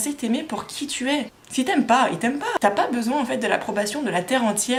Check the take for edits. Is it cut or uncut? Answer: uncut